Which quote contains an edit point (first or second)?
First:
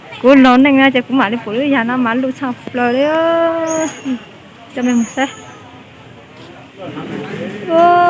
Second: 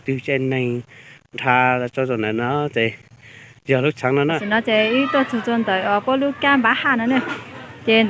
second